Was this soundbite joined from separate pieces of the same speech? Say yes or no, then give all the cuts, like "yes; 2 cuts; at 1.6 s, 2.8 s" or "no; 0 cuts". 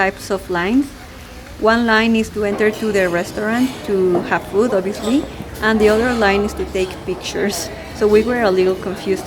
no; 0 cuts